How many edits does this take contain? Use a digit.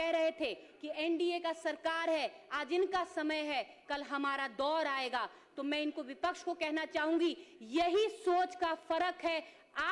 0